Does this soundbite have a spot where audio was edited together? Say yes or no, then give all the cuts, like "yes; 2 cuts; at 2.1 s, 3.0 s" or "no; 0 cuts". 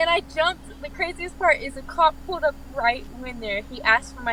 no; 0 cuts